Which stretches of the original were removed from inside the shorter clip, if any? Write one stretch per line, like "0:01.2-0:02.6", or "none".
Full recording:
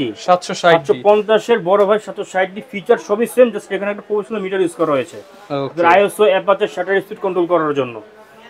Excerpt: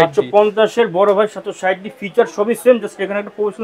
none